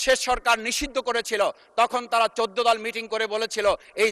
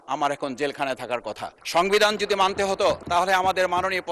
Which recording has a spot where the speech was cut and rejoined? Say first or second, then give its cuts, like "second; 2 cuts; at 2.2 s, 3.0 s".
second; 2 cuts; at 1.5 s, 3.0 s